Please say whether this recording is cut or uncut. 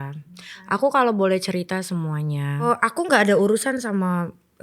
cut